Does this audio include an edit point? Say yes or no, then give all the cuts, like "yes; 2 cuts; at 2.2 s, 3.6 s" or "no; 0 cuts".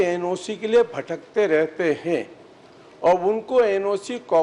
no; 0 cuts